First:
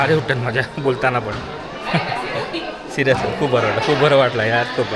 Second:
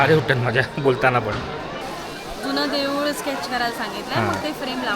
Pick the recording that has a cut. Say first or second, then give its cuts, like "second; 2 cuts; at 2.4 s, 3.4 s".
second; 1 cut; at 1.8 s